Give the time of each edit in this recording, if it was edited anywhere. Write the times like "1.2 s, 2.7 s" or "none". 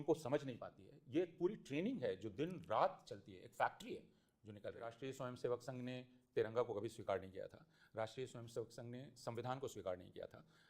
5.0 s